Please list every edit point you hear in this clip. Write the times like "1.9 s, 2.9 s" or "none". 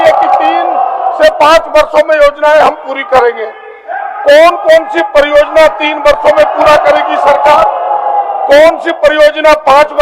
none